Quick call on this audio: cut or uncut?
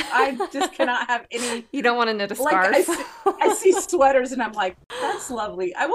cut